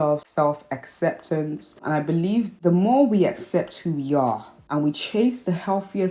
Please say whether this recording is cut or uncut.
cut